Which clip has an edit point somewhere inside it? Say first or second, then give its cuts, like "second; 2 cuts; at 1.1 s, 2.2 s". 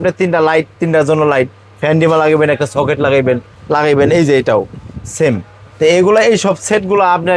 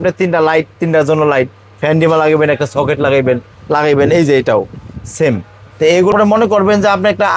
second; 1 cut; at 6.1 s